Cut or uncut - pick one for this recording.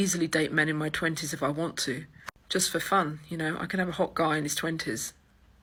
uncut